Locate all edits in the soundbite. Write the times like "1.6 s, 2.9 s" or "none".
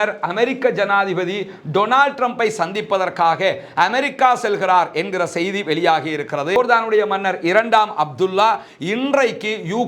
none